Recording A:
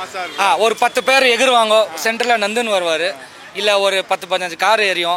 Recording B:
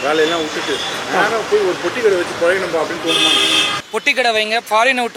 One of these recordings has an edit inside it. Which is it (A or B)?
B